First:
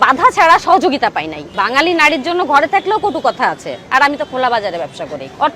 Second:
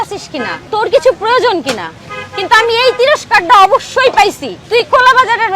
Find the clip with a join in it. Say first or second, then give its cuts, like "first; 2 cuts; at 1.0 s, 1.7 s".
first; 1 cut; at 1.4 s